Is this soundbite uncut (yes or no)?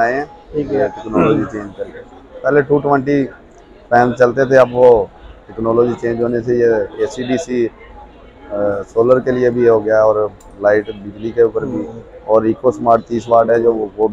yes